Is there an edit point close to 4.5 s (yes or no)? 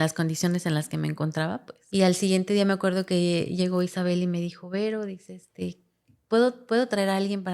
no